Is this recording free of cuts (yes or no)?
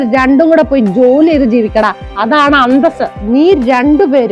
no